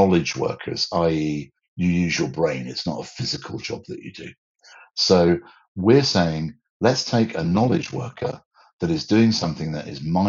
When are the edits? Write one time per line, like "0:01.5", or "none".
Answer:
none